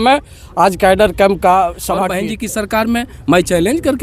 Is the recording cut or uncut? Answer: cut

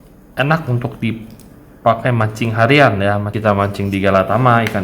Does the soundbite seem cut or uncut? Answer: cut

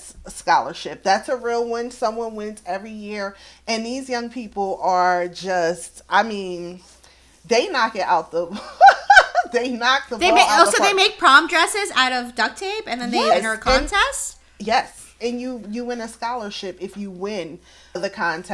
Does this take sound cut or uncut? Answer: uncut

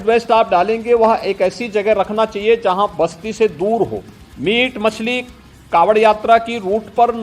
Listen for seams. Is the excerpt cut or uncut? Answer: uncut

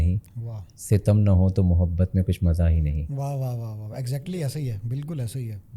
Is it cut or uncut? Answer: uncut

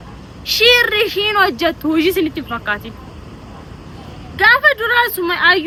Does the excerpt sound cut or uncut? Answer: uncut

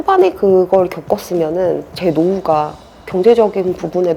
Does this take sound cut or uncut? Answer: cut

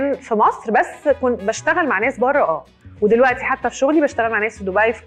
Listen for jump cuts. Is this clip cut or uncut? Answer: uncut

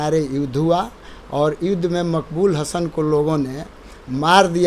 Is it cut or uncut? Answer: uncut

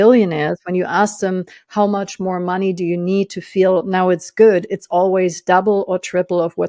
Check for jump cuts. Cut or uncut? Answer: uncut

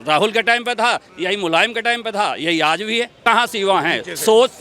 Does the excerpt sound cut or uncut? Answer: cut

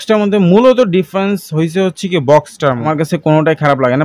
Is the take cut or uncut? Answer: cut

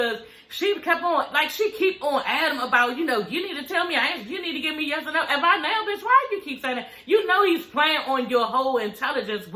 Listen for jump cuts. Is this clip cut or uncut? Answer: uncut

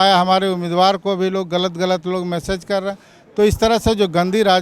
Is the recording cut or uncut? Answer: uncut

